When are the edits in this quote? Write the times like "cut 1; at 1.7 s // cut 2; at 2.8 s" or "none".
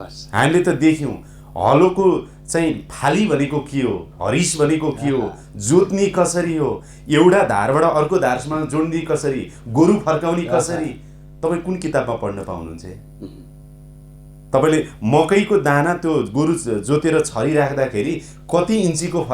none